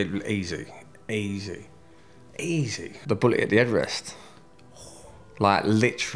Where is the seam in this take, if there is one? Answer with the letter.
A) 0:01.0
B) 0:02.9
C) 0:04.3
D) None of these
B